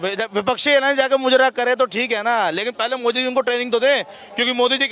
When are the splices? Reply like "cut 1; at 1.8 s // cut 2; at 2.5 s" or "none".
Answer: none